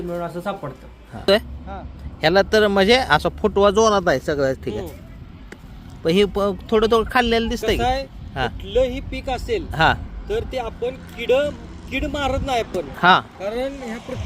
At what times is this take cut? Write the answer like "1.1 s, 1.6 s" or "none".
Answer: 1.3 s